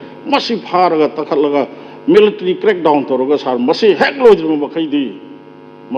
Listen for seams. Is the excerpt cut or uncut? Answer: uncut